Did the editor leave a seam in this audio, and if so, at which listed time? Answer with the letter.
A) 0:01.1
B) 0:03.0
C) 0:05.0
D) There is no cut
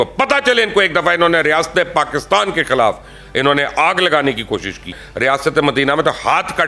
C